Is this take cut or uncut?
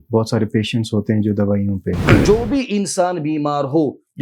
cut